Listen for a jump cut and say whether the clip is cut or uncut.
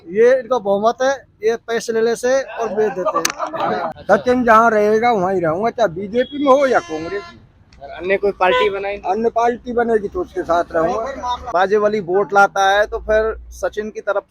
cut